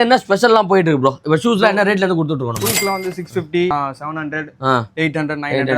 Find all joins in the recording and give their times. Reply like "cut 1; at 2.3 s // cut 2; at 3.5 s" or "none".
cut 1; at 3.7 s